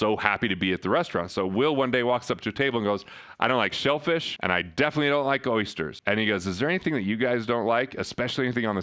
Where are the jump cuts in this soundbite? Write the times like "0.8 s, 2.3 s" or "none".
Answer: 4.3 s, 6.0 s